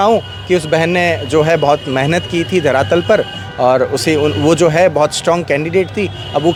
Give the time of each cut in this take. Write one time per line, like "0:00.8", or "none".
none